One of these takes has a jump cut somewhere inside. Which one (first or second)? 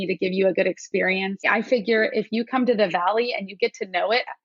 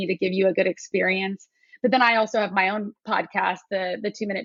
first